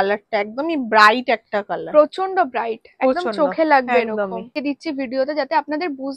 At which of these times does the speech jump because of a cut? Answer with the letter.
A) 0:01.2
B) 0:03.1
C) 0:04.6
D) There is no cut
C